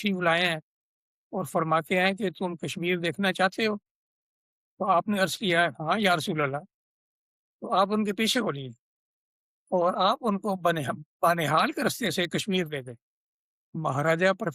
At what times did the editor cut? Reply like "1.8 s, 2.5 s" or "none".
13.6 s